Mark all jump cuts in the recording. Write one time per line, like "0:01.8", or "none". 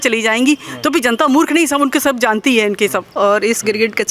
0:03.2